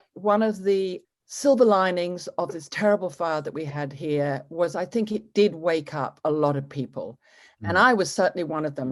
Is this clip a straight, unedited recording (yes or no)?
no